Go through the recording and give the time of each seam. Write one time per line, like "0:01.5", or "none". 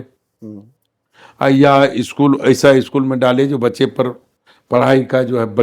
none